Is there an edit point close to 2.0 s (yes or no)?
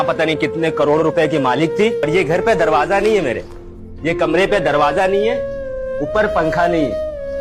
yes